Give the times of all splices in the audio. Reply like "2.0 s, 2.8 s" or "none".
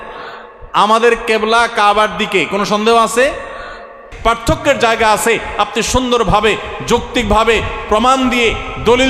4.1 s